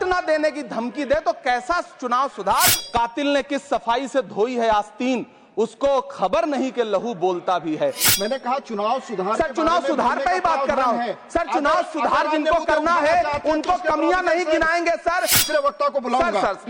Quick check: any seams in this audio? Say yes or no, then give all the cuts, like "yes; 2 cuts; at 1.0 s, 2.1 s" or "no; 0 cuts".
yes; 3 cuts; at 2.8 s, 8.0 s, 15.4 s